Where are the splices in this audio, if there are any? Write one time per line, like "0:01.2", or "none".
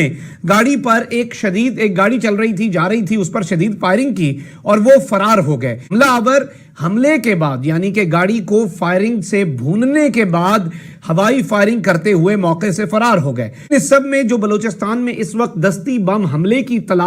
0:13.7